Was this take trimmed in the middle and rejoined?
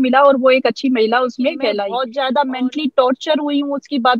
yes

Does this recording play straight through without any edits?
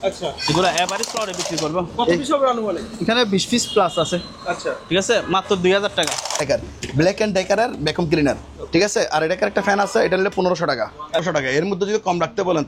no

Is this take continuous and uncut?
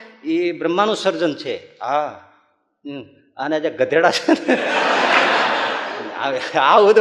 yes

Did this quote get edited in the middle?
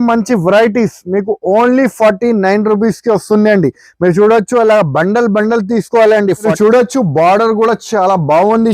yes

